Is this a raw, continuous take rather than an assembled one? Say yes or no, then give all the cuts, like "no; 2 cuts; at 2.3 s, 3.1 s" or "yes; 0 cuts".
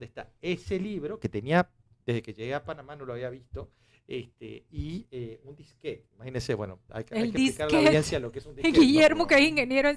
yes; 0 cuts